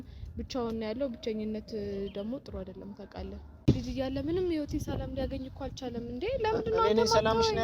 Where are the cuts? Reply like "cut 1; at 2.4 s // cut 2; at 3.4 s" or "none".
cut 1; at 3.7 s